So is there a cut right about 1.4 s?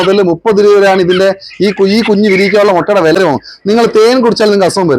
no; 1 cut; at 3.2 s

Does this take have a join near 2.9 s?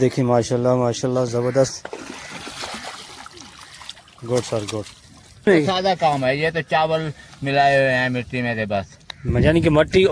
no; 1 cut; at 5.5 s

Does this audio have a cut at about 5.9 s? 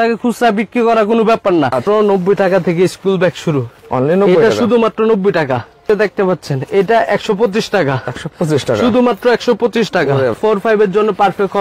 yes; 3 cuts; at 1.8 s, 5.9 s, 10.4 s

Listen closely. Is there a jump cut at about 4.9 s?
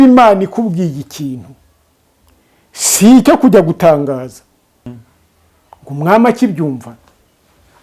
yes; 1 cut; at 4.9 s

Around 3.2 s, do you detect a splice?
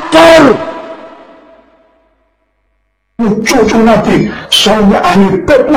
yes; 1 cut; at 3.2 s

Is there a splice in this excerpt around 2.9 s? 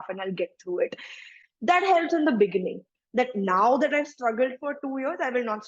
yes; 1 cut; at 2.9 s

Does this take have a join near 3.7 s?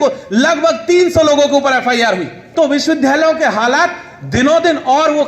no; 1 cut; at 2.4 s

